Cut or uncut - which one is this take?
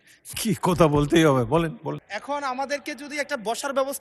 cut